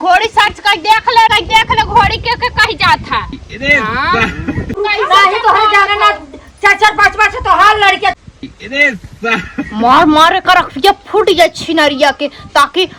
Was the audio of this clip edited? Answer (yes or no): yes